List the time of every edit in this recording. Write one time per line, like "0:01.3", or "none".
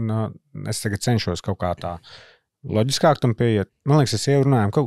0:03.7